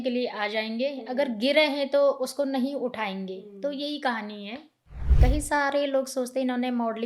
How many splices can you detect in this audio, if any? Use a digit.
1